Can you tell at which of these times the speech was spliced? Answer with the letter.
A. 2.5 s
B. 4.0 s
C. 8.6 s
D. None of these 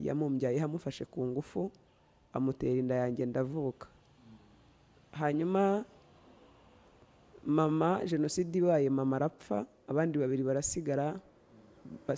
D